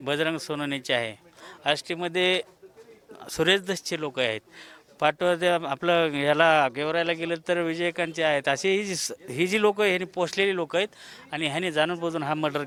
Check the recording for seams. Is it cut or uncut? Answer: uncut